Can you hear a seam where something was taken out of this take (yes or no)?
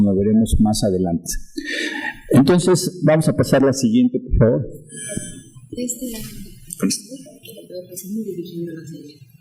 no